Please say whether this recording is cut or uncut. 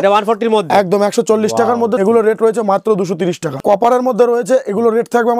cut